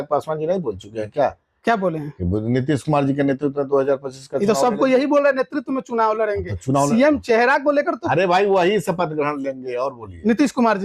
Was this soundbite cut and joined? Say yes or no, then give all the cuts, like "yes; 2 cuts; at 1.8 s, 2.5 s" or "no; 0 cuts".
no; 0 cuts